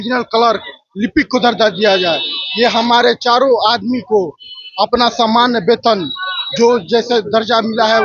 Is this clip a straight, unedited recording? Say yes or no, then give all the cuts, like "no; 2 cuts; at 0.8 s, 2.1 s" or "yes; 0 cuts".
yes; 0 cuts